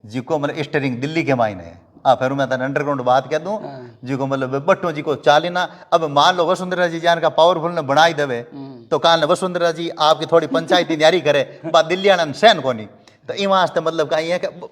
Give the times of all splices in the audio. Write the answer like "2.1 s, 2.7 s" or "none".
none